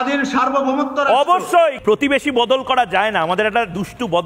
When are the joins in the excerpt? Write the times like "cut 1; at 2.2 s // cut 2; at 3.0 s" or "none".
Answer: cut 1; at 1.8 s